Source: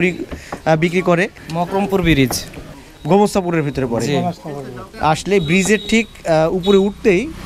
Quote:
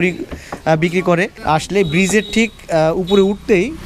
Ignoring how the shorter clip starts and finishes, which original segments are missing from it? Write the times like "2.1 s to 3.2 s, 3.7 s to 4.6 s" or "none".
1.3 s to 4.9 s